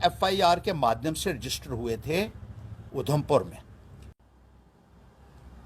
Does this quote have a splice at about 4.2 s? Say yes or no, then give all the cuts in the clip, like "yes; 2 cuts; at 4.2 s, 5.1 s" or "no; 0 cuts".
yes; 1 cut; at 4.2 s